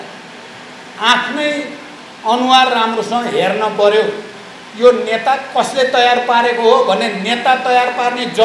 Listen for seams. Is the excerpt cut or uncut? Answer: uncut